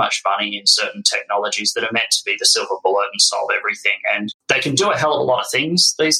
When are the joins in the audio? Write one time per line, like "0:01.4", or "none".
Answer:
0:04.4